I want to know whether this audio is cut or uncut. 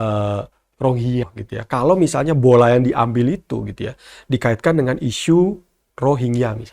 cut